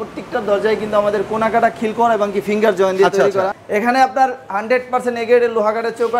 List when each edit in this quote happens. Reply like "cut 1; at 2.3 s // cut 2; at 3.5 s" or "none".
cut 1; at 3.6 s